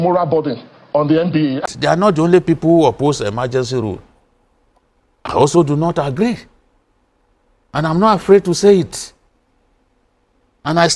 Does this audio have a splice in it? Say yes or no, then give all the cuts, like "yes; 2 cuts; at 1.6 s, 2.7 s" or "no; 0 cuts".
yes; 1 cut; at 1.6 s